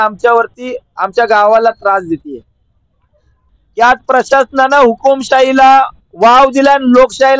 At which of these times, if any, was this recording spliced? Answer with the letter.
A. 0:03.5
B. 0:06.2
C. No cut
A